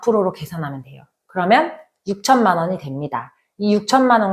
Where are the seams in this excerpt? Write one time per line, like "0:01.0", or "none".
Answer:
none